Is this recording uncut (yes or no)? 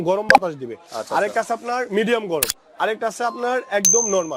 yes